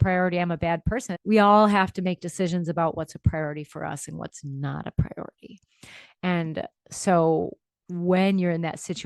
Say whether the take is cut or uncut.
cut